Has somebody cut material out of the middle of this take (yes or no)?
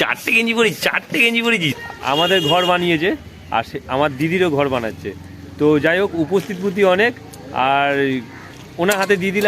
yes